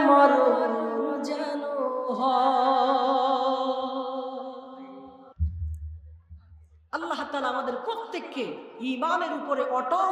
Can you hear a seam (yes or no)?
no